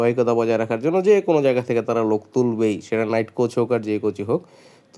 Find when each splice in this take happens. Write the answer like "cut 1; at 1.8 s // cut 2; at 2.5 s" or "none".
none

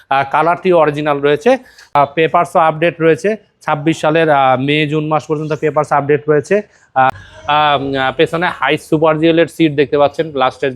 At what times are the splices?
cut 1; at 1.9 s // cut 2; at 7.2 s

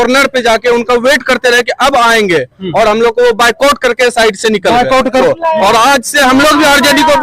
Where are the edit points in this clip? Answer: cut 1; at 5.2 s

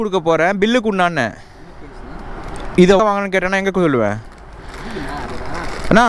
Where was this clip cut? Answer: none

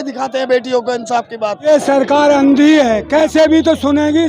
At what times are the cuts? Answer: cut 1; at 1.6 s

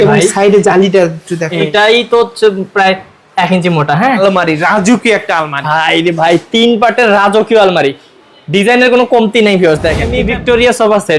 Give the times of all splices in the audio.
cut 1; at 1.7 s // cut 2; at 4.0 s // cut 3; at 10.2 s

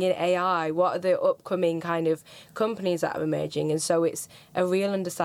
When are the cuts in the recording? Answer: none

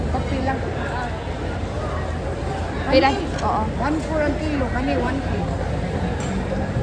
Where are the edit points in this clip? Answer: none

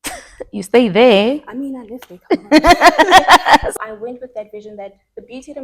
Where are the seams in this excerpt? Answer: cut 1; at 3.7 s

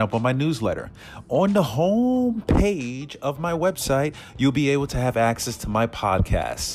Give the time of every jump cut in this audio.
none

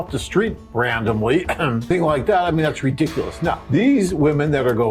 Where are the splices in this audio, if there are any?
cut 1; at 3.6 s

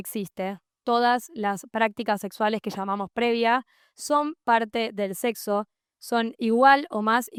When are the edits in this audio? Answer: none

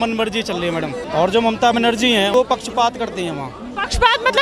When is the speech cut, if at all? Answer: cut 1; at 1.0 s // cut 2; at 2.3 s

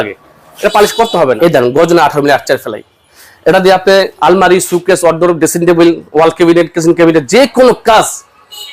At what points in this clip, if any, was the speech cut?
cut 1; at 1.4 s // cut 2; at 4.1 s

